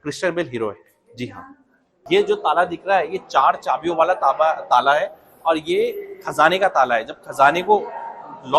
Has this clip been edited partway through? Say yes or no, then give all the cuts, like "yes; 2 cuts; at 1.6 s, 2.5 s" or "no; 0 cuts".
yes; 1 cut; at 2.0 s